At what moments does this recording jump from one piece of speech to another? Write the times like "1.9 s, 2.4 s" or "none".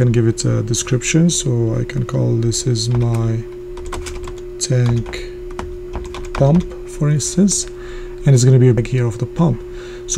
8.8 s